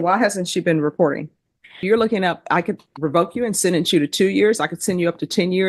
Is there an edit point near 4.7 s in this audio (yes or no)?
no